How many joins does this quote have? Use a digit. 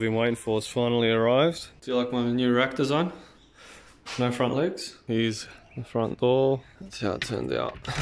3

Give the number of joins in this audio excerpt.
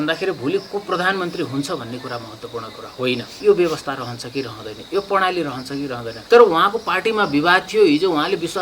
2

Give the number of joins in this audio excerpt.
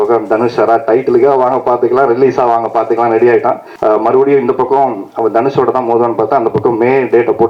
1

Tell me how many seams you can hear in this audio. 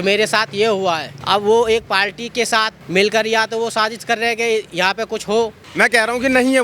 3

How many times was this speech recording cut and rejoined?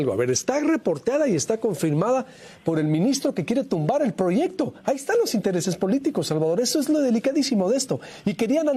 0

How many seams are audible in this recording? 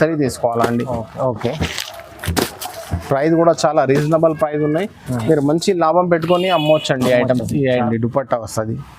1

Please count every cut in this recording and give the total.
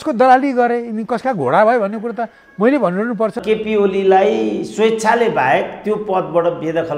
1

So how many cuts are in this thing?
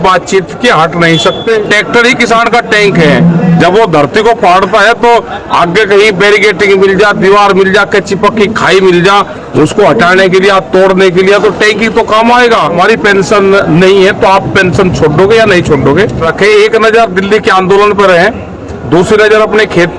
3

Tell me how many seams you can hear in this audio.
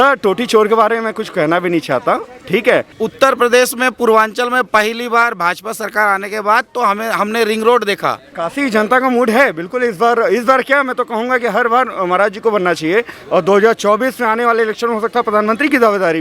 2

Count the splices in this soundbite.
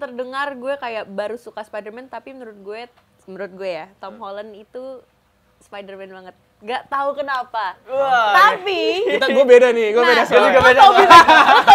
0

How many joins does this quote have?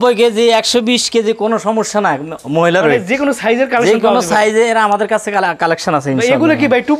0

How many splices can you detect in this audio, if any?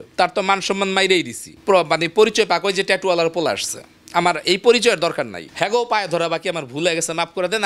2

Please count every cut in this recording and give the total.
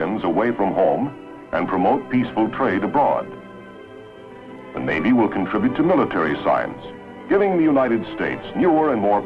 0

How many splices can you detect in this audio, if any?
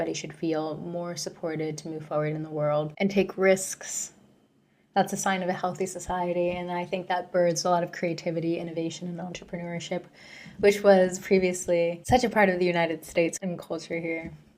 1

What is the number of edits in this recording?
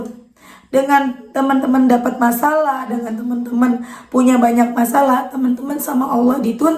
0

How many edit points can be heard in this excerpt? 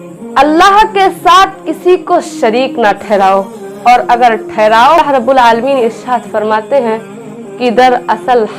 1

